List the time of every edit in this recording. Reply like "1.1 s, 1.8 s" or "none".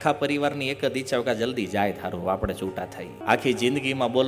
3.2 s